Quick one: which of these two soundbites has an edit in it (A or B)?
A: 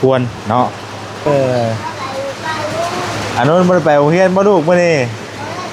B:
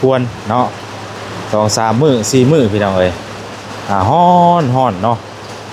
A